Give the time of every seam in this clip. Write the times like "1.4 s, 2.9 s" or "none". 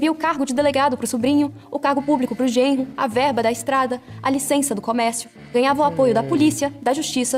none

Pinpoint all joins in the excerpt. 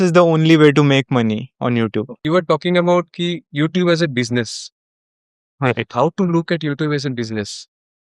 2.2 s

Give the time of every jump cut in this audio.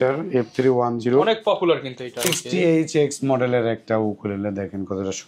2.4 s

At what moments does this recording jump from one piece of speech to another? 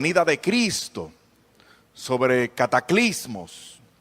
1.1 s

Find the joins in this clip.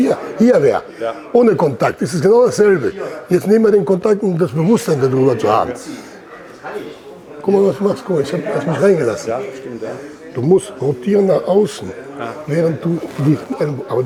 none

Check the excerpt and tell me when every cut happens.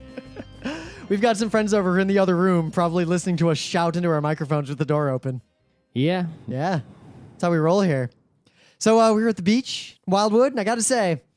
none

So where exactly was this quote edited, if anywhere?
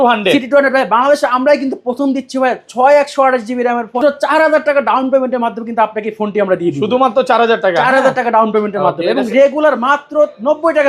4.0 s

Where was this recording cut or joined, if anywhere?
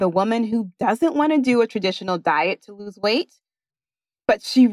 none

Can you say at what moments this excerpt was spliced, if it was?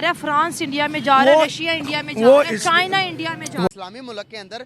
3.7 s

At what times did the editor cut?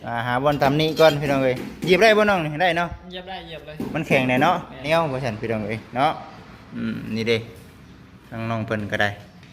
4.8 s

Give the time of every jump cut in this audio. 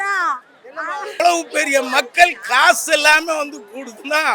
1.2 s

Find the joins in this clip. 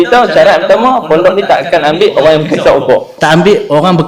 3.1 s

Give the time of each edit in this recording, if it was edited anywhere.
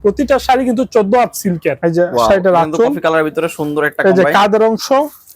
1.7 s

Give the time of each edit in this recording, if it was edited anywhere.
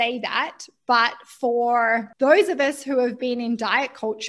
2.1 s

